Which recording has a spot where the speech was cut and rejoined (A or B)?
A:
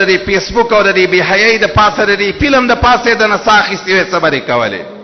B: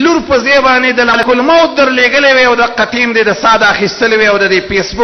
B